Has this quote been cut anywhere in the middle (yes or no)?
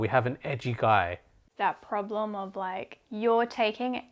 yes